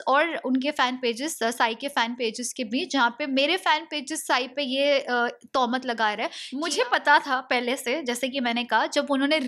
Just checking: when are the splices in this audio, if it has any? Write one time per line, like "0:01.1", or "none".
0:06.5